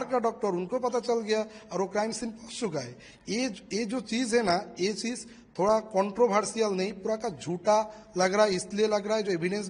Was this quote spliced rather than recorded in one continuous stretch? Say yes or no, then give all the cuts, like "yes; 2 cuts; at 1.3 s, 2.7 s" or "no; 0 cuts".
no; 0 cuts